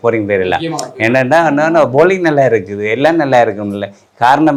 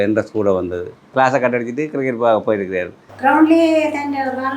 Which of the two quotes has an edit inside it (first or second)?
second